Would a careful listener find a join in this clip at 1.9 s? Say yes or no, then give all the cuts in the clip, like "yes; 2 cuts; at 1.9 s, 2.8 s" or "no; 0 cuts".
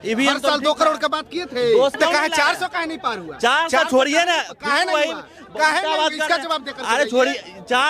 yes; 1 cut; at 1.9 s